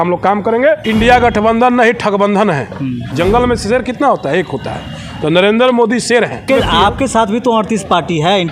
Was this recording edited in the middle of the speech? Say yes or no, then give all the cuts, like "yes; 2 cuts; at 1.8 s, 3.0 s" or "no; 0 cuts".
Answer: yes; 3 cuts; at 0.8 s, 3.1 s, 6.5 s